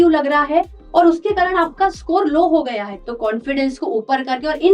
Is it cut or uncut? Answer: cut